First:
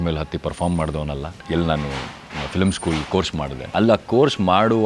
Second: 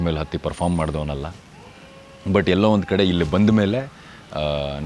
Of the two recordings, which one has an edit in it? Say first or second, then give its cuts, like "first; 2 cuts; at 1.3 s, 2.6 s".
first; 2 cuts; at 1.4 s, 3.6 s